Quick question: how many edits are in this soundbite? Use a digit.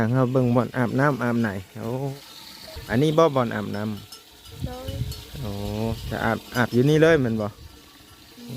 1